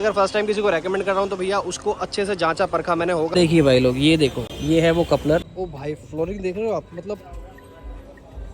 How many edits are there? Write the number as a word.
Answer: two